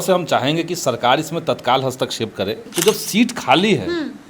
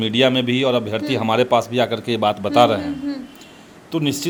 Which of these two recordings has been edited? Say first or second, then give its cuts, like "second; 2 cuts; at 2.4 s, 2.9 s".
first; 1 cut; at 2.6 s